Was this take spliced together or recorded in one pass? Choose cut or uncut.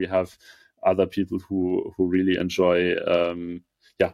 uncut